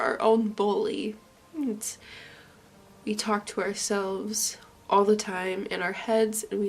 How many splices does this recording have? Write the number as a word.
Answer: zero